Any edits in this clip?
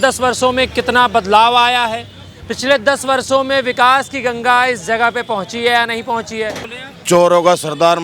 yes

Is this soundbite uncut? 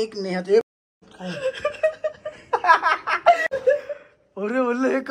no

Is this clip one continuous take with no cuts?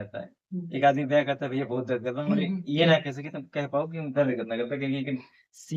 yes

